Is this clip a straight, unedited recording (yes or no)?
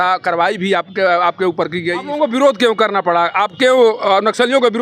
no